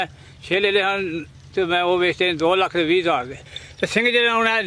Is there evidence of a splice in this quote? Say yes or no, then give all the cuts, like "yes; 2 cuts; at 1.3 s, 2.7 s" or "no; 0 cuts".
yes; 1 cut; at 3.5 s